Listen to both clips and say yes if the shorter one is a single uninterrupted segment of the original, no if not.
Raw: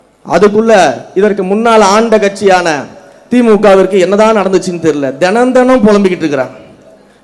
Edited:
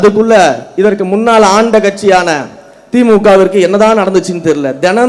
yes